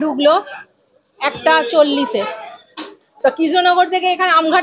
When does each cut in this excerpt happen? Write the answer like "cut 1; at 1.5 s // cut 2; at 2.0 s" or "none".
cut 1; at 3.0 s